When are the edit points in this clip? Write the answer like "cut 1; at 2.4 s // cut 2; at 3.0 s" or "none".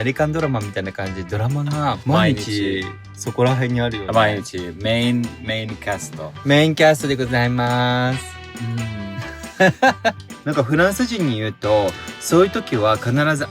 cut 1; at 2.0 s // cut 2; at 10.3 s

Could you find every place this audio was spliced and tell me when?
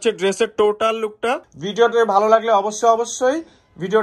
cut 1; at 1.6 s

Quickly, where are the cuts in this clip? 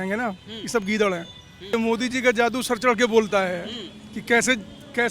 cut 1; at 1.7 s

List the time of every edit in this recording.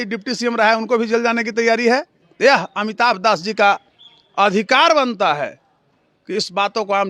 cut 1; at 2.2 s

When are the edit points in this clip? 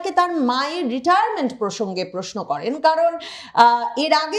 none

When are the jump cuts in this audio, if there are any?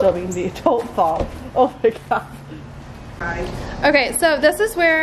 cut 1; at 3.2 s

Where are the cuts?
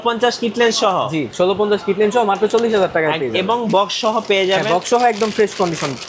none

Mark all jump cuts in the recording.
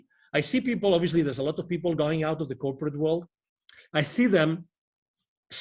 none

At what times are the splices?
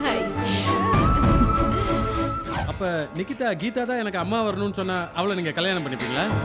cut 1; at 2.5 s

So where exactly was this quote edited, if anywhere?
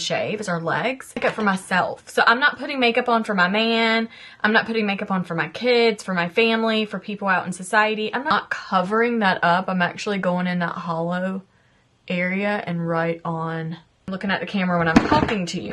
cut 1; at 1.2 s // cut 2; at 8.3 s // cut 3; at 14.1 s

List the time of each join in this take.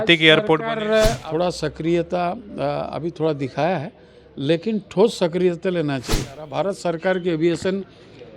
cut 1; at 1.2 s // cut 2; at 6.5 s

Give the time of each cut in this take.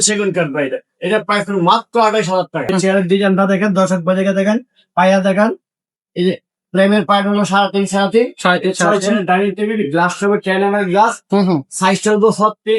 cut 1; at 2.7 s

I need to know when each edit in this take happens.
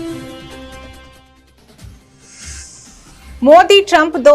none

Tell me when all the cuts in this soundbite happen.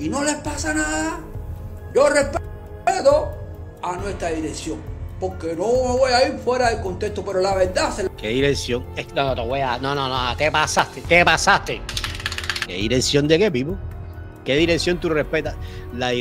none

